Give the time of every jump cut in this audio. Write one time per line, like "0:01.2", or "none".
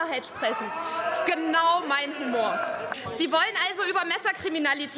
0:03.0